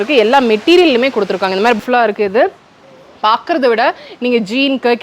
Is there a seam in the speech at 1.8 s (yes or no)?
yes